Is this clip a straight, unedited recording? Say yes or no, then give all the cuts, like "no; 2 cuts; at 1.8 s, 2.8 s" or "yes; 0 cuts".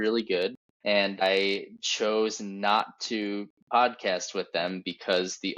no; 1 cut; at 1.2 s